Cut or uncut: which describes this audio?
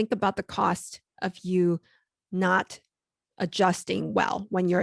uncut